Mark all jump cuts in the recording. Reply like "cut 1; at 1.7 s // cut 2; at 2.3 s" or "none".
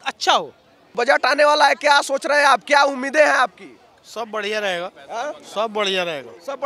cut 1; at 0.9 s